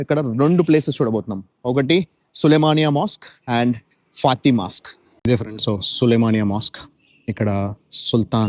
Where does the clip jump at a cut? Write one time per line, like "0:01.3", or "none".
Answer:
0:05.2